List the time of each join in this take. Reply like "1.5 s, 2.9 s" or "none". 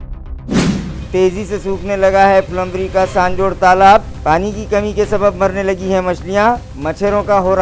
1.0 s